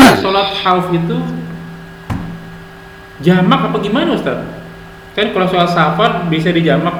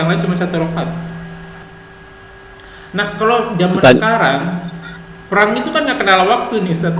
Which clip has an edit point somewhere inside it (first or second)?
second